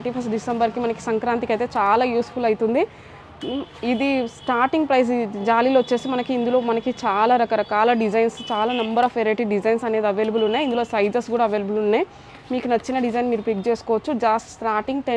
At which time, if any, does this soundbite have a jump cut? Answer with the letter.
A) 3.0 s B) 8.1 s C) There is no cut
C